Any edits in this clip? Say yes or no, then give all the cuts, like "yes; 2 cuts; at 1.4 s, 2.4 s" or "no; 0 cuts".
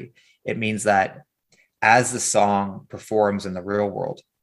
no; 0 cuts